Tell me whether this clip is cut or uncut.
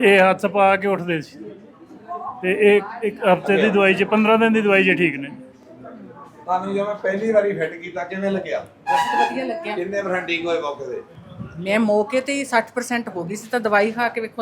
uncut